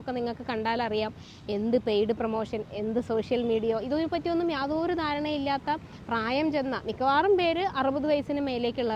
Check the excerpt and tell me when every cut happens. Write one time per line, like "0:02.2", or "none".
none